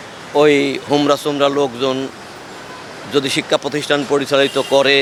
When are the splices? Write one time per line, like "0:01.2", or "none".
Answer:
none